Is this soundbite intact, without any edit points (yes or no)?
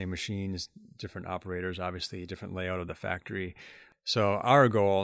no